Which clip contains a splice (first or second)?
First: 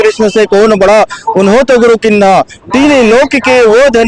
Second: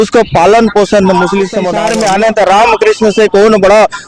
second